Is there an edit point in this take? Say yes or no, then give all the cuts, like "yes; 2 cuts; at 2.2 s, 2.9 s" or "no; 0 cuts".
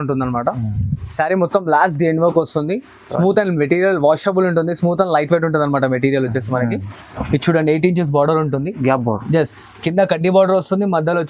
no; 0 cuts